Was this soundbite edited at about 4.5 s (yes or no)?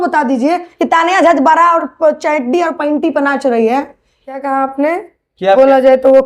yes